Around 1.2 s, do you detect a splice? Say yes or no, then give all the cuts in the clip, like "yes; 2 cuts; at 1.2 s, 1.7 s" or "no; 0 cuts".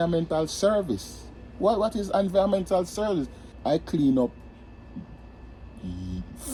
no; 0 cuts